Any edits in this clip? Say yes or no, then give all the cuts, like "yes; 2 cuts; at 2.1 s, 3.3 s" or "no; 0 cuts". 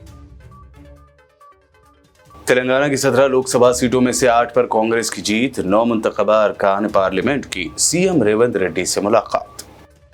no; 0 cuts